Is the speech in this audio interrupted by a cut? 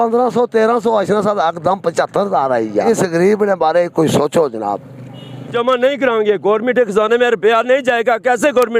yes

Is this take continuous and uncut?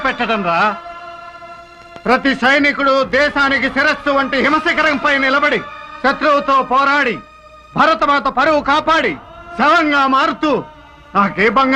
yes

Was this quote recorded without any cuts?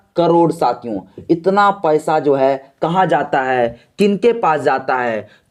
yes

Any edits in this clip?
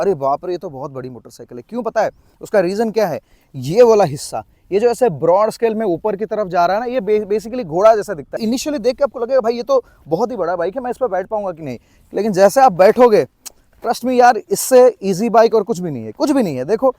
no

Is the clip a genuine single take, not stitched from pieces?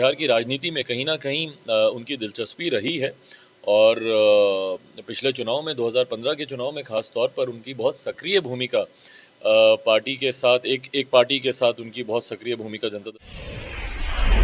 no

